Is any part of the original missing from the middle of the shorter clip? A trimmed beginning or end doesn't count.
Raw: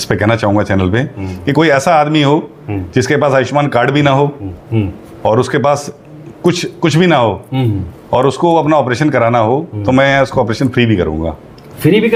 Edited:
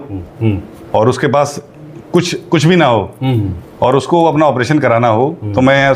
no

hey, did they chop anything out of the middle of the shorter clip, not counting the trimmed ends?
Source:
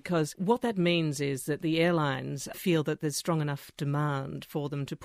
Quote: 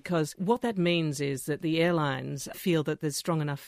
no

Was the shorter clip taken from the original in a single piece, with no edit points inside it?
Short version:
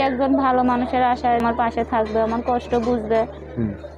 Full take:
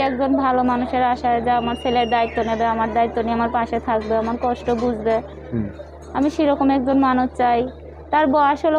no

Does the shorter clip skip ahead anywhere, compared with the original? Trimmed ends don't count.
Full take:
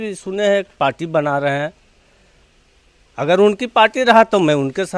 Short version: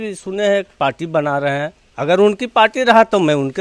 yes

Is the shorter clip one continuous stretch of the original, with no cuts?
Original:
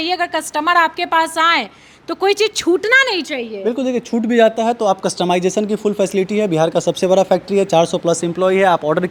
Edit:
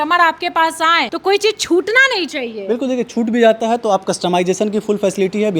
no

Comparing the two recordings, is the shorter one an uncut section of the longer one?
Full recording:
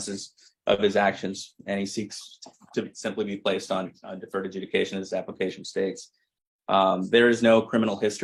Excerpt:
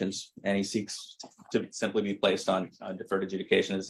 yes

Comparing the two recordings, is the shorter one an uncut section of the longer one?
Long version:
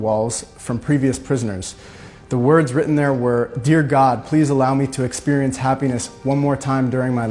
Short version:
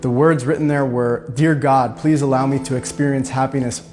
yes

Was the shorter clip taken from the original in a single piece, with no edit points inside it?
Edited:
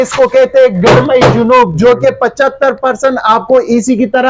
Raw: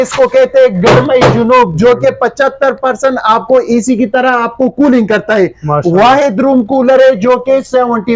yes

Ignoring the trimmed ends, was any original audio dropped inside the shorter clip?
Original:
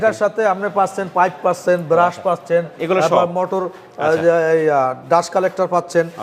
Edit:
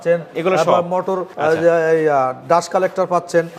yes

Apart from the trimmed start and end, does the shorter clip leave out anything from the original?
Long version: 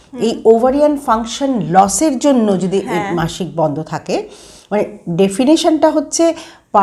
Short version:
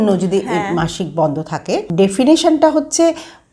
yes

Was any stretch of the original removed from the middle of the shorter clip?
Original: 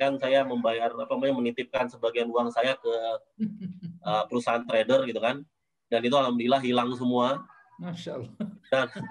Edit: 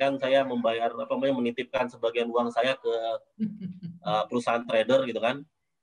no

